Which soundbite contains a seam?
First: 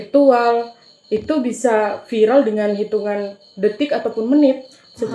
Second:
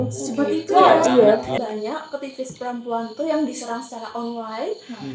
second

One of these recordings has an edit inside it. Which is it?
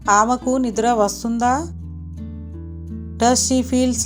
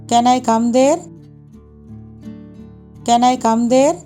second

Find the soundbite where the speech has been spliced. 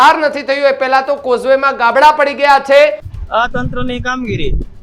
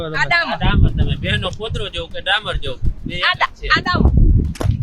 first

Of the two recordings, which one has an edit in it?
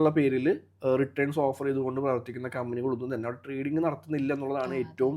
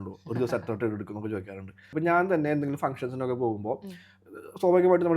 second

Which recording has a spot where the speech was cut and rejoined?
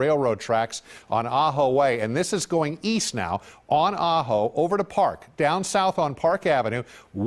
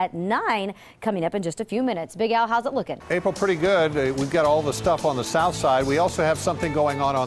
second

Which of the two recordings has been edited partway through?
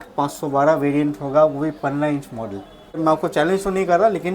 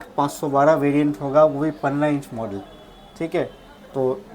first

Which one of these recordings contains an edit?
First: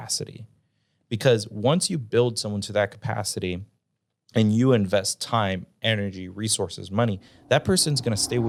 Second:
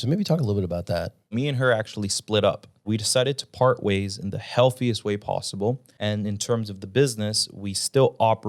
second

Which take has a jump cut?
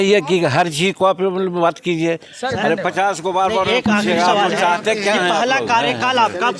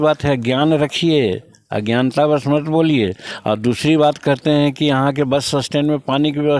first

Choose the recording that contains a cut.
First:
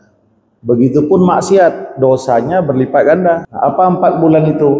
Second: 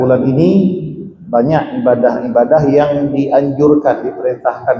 first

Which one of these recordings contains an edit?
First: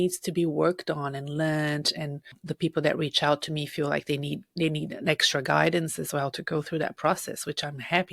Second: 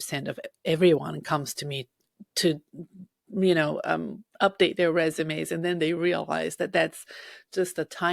first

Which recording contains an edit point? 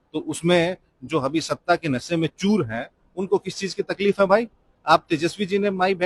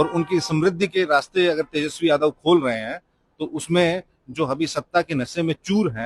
first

